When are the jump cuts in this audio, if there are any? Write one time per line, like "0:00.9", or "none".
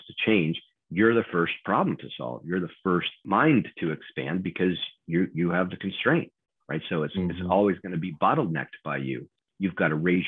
0:03.2
0:09.3